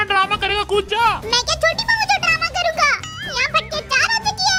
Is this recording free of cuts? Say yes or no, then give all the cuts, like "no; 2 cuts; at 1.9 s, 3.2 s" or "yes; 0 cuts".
yes; 0 cuts